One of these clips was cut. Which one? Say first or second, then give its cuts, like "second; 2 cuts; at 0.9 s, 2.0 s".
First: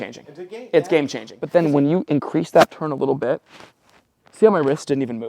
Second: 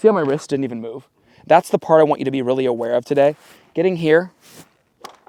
first; 1 cut; at 1.3 s